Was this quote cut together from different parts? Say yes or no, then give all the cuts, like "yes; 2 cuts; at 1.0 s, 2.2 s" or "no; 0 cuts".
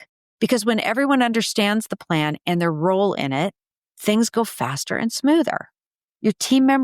no; 0 cuts